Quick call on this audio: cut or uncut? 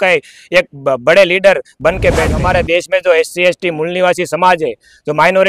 cut